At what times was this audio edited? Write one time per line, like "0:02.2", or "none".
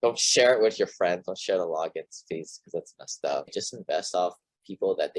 0:03.5